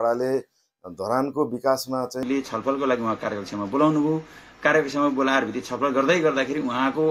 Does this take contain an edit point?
yes; 1 cut; at 2.2 s

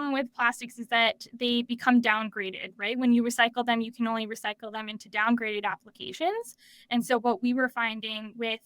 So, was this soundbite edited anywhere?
no; 0 cuts

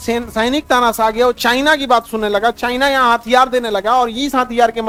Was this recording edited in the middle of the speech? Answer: no; 0 cuts

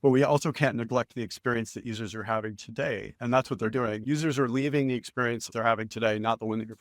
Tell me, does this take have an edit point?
yes; 1 cut; at 5.5 s

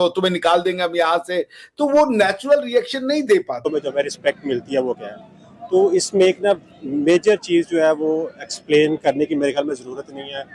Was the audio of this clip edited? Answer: yes; 1 cut; at 3.6 s

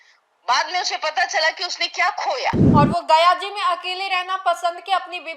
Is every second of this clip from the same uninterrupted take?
no; 1 cut; at 2.6 s

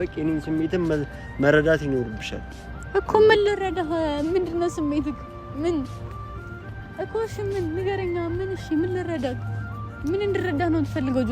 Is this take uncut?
yes; 0 cuts

